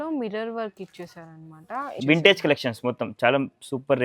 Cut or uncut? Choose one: cut